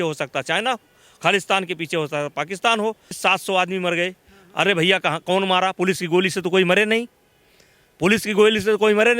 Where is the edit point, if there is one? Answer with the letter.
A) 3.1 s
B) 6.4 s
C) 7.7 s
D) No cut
A